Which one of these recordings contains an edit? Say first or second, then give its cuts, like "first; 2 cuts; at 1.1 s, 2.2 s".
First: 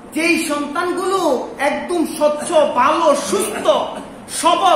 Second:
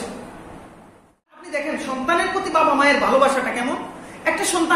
second; 1 cut; at 1.5 s